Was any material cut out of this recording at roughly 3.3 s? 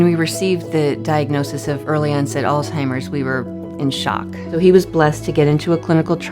no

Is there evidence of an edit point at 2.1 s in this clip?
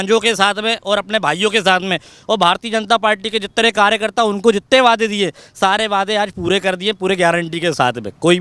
no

